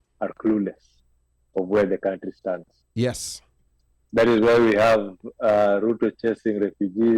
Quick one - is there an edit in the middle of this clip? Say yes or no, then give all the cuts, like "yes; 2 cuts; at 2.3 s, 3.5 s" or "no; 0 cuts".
no; 0 cuts